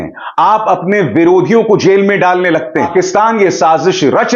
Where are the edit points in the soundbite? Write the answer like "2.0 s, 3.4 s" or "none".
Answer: 2.9 s